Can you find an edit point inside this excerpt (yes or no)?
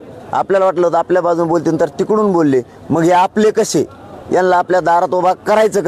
no